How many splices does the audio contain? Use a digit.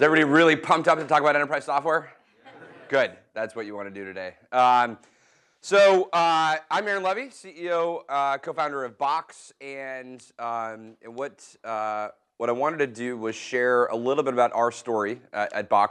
0